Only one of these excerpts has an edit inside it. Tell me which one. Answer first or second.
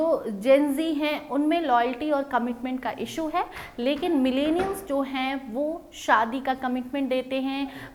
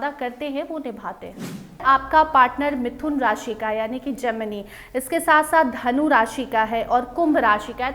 second